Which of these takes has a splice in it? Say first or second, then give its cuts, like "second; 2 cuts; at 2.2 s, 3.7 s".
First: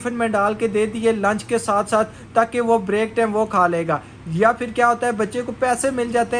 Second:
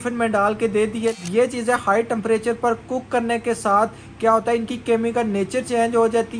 second; 1 cut; at 1.2 s